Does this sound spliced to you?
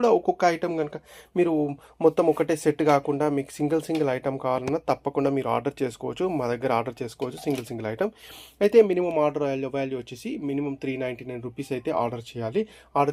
no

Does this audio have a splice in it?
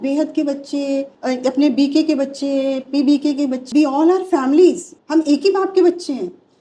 yes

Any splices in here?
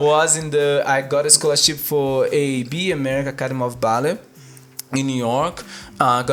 no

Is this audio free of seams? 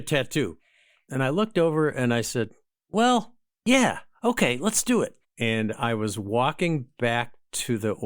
no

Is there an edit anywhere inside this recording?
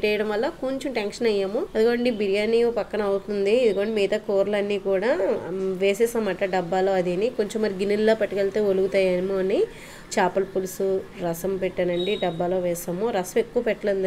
yes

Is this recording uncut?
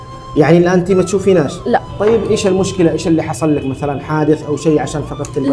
yes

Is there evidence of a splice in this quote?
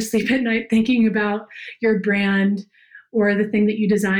no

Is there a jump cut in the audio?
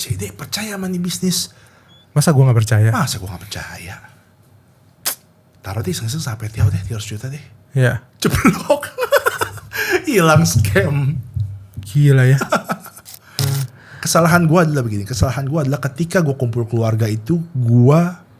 yes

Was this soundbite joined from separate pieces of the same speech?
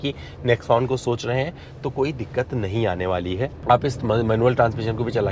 yes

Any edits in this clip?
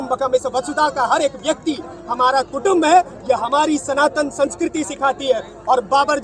no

